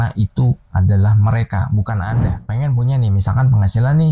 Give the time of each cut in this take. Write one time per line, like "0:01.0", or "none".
0:02.4